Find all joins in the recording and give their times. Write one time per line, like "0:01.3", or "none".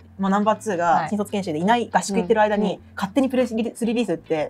0:01.1